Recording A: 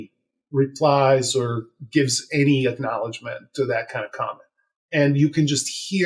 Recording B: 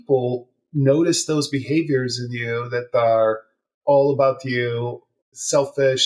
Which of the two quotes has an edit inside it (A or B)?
B